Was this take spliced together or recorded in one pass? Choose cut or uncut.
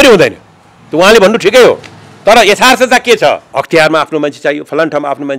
cut